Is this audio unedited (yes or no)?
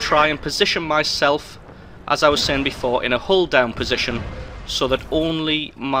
yes